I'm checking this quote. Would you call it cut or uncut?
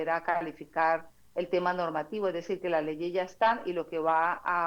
uncut